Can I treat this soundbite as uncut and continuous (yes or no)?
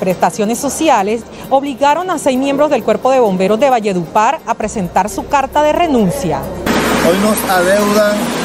no